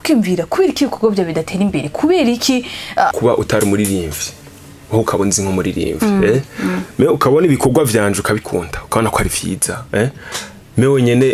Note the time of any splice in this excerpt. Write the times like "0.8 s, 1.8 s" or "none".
3.1 s